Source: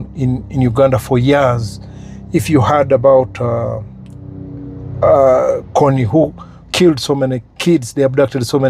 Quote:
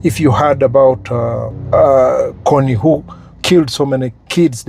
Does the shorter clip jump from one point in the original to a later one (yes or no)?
yes